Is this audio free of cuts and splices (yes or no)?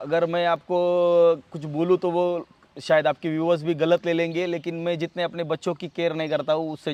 yes